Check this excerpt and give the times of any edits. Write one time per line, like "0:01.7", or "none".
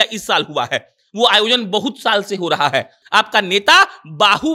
0:03.0